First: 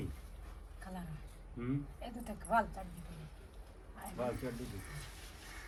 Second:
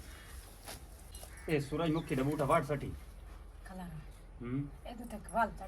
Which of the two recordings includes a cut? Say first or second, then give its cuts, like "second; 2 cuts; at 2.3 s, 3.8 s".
second; 1 cut; at 1.1 s